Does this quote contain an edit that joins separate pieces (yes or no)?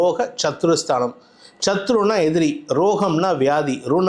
no